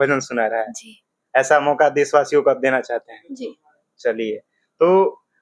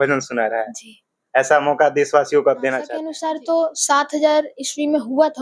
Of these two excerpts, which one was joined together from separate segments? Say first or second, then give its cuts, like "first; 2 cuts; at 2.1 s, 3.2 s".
second; 1 cut; at 3.1 s